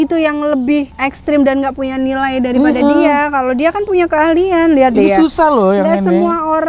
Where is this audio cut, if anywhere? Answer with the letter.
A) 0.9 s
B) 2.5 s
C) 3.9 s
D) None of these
A